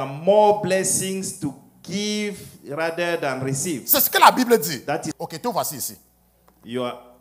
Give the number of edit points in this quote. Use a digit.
1